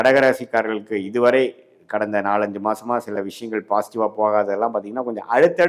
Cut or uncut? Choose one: uncut